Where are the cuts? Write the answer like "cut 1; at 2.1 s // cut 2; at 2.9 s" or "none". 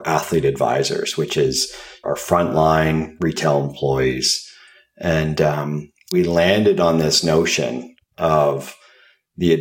cut 1; at 2.0 s // cut 2; at 6.1 s